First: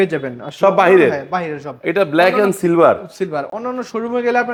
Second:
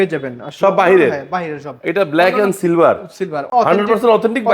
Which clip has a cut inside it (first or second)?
second